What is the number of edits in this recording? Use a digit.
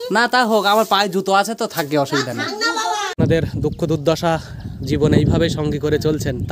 1